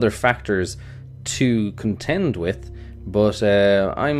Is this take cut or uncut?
cut